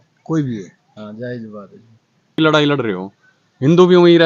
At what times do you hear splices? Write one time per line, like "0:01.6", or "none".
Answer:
0:02.3